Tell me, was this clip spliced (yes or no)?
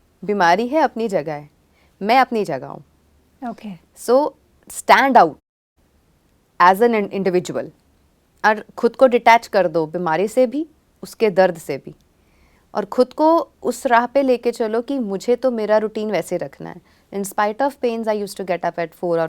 no